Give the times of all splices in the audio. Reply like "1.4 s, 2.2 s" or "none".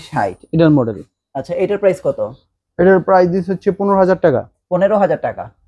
none